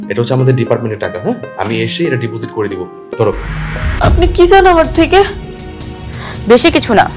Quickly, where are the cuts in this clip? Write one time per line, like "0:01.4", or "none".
0:03.8